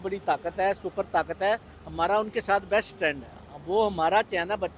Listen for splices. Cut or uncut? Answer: uncut